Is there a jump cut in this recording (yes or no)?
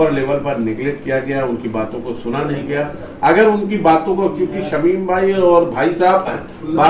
no